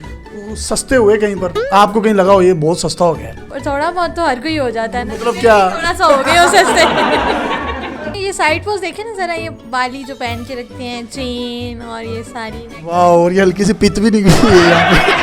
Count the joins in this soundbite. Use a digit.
2